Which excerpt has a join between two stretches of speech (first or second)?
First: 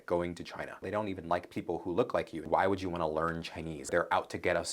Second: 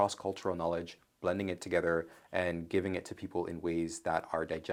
first